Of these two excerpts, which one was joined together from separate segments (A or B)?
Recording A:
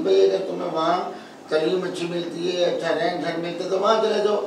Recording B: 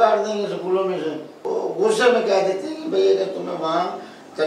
B